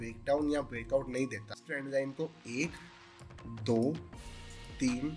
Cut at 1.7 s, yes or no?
yes